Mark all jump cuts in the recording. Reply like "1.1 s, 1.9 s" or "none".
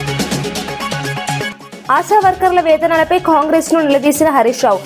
1.7 s